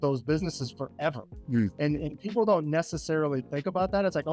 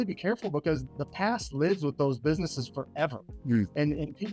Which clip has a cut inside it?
second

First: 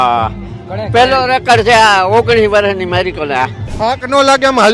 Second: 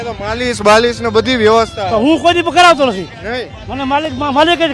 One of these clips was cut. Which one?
first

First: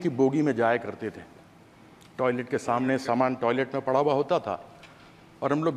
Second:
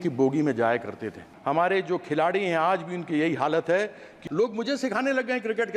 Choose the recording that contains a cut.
second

